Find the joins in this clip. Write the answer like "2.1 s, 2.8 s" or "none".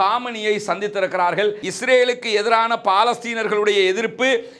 1.6 s